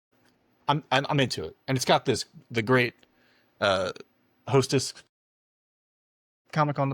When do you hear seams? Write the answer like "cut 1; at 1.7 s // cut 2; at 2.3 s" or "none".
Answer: none